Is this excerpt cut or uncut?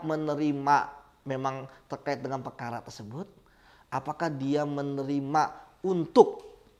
uncut